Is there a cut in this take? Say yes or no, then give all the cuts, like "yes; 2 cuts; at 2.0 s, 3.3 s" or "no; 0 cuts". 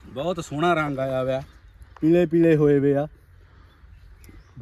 no; 0 cuts